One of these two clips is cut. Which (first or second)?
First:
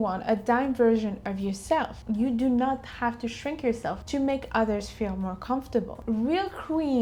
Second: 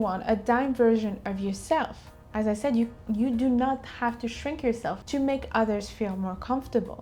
first